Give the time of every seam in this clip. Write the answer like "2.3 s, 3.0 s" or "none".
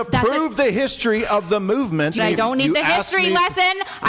2.2 s